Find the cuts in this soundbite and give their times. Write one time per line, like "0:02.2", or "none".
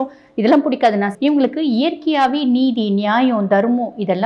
0:01.1